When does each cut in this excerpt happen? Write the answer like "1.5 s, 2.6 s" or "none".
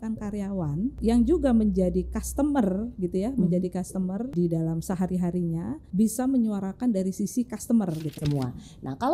1.0 s, 4.3 s, 5.8 s, 8.2 s

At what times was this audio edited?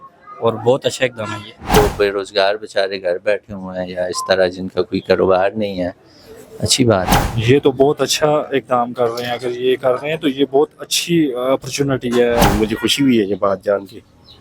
1.8 s, 7.1 s, 12.4 s

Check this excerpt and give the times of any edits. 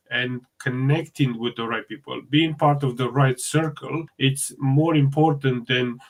none

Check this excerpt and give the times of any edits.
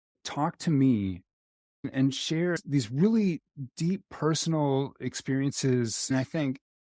2.6 s

